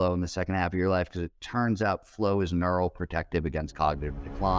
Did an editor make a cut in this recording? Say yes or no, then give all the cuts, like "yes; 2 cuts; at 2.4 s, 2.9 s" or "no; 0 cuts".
no; 0 cuts